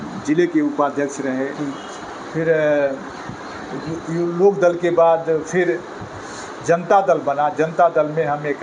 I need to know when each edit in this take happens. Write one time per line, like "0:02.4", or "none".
none